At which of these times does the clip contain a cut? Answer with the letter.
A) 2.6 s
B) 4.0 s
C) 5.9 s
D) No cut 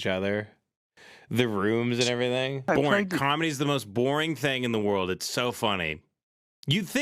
A